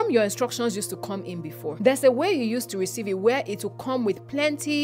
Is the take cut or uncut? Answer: cut